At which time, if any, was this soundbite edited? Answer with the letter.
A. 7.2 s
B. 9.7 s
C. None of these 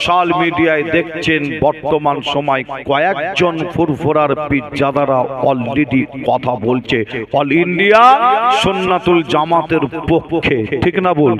C